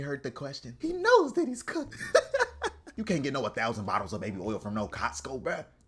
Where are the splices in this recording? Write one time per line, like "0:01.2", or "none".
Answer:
0:01.9
0:02.8